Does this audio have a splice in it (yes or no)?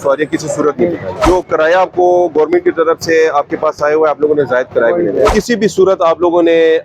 yes